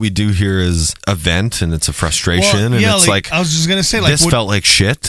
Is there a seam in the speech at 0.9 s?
yes; 1 cut; at 0.9 s

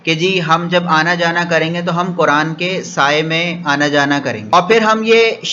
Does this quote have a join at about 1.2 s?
no; 1 cut; at 4.5 s

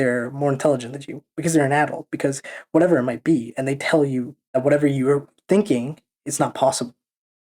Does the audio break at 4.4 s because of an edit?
yes; 1 cut; at 4.4 s

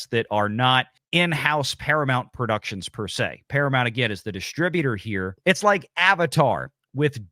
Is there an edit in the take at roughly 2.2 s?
no; 2 cuts; at 1.0 s, 5.3 s

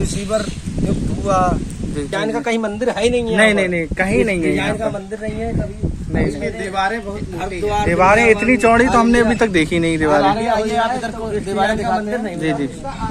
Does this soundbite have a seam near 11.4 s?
no; 1 cut; at 2.1 s

